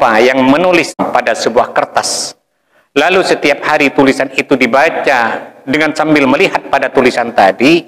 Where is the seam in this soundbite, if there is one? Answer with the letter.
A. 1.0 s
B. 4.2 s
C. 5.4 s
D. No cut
A